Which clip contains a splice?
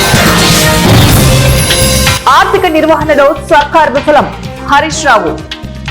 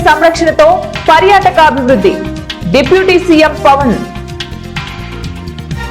first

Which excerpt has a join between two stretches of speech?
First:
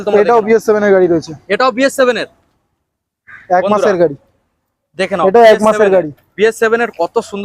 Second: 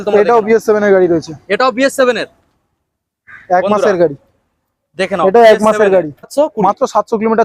second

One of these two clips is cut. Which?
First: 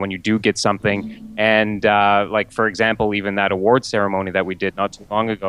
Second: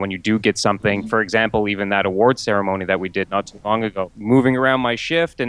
second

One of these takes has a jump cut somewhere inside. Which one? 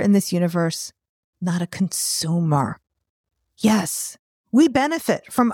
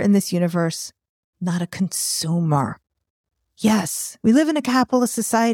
first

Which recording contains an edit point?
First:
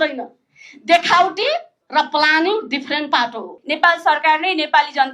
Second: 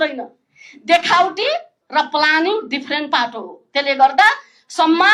first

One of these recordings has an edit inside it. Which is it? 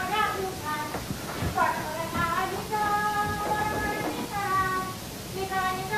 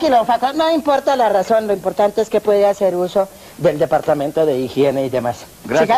second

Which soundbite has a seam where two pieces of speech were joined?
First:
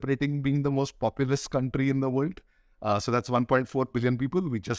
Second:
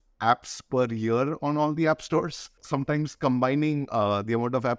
second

